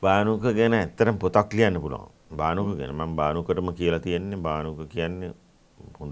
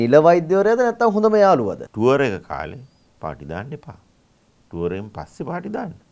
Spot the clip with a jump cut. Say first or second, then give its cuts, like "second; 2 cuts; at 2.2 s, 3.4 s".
second; 1 cut; at 1.9 s